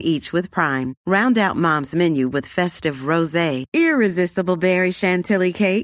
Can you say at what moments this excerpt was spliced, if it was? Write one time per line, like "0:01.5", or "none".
none

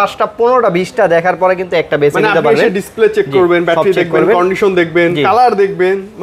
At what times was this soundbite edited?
none

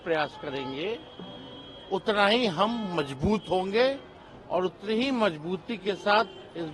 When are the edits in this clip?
none

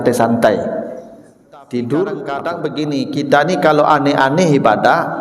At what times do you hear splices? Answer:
0:02.6

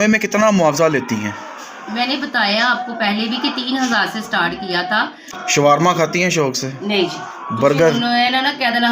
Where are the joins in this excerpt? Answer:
0:05.3

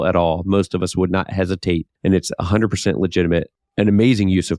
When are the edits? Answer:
0:01.9
0:03.6

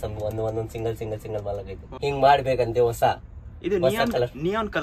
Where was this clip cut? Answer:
0:01.8

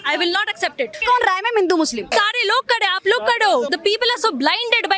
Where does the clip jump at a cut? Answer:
0:01.0
0:02.1
0:03.7

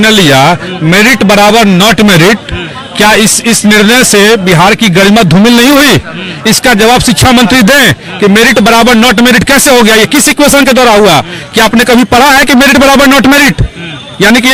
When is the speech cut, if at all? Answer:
none

